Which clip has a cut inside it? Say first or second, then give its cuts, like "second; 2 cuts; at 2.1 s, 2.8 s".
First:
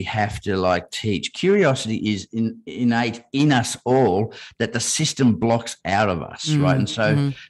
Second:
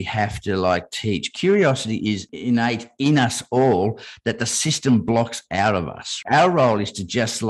second; 2 cuts; at 2.3 s, 6.1 s